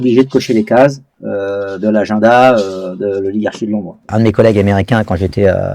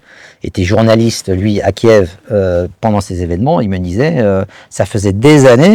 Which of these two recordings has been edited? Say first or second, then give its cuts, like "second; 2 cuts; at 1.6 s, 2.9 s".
first; 1 cut; at 4.1 s